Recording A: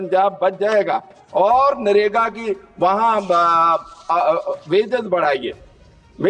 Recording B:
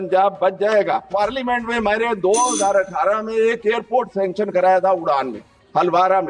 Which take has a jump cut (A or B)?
B